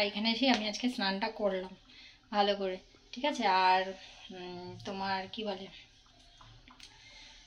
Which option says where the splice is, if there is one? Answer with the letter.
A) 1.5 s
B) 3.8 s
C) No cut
C